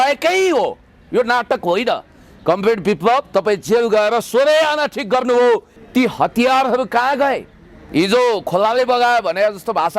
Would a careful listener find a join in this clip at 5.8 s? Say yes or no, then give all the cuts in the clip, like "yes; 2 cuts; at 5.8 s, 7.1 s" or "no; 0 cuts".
yes; 1 cut; at 5.8 s